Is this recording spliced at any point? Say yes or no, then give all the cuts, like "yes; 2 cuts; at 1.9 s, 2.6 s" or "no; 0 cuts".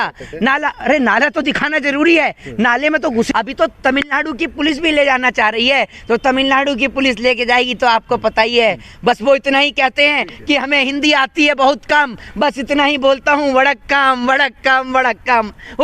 yes; 1 cut; at 3.3 s